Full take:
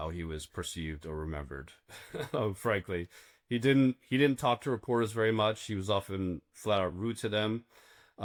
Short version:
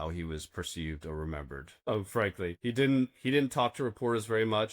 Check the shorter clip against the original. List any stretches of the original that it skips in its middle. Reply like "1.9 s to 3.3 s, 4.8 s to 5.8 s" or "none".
1.9 s to 2.4 s, 3.1 s to 3.4 s